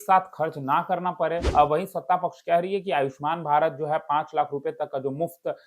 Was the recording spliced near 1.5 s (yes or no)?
yes